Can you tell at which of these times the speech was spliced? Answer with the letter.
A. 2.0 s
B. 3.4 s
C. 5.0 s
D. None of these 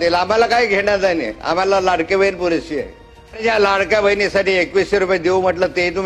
B